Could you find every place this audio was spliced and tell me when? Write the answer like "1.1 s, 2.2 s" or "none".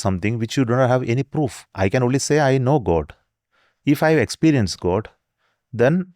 1.6 s